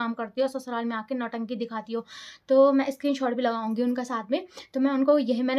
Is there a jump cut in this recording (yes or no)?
no